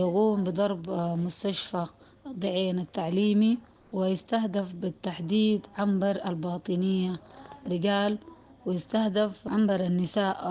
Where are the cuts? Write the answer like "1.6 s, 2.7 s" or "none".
3.8 s, 9.5 s